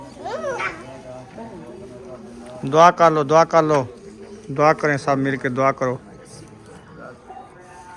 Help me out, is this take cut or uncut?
uncut